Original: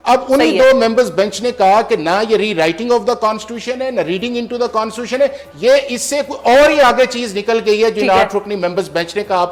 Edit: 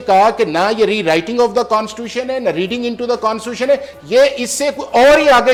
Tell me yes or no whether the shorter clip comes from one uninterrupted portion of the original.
yes